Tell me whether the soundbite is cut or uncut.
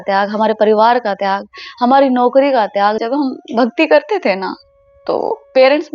cut